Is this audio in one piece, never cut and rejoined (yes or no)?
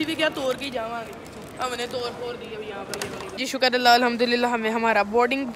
no